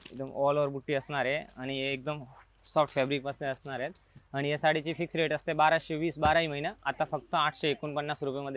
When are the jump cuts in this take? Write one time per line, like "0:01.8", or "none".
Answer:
none